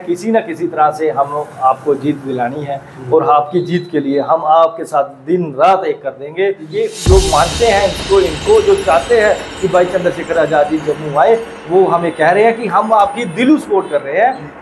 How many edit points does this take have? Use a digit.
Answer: 1